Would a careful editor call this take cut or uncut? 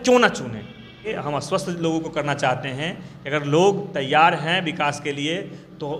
cut